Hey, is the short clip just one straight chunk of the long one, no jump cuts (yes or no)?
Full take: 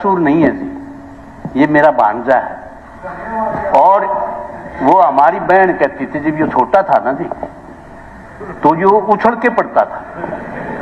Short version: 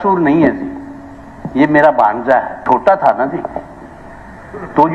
no